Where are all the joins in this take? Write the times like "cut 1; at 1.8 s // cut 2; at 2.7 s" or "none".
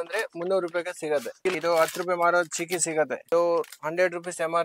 cut 1; at 1.5 s // cut 2; at 3.2 s